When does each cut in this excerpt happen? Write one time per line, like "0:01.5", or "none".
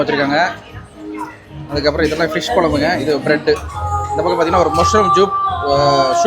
none